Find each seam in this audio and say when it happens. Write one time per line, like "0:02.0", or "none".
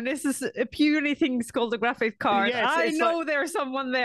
none